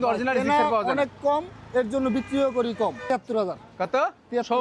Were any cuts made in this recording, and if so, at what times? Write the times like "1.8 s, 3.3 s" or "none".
3.0 s